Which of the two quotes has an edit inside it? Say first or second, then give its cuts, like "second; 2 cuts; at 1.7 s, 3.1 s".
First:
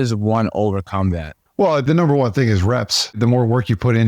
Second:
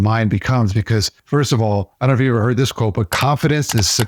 first; 2 cuts; at 1.8 s, 3.2 s